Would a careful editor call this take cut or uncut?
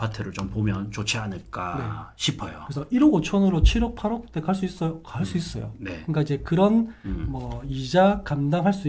uncut